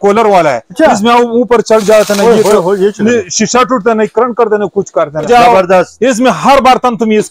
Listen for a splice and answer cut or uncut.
cut